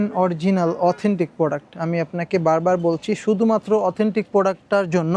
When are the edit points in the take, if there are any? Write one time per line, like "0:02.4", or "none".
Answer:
none